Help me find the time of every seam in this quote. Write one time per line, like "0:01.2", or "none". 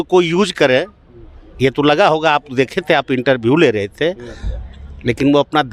none